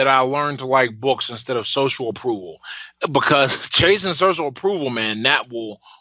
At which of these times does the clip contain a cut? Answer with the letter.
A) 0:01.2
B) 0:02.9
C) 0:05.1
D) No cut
B